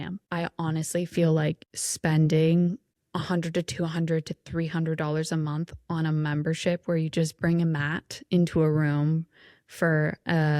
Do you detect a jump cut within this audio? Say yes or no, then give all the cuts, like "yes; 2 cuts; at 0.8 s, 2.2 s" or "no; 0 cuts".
no; 0 cuts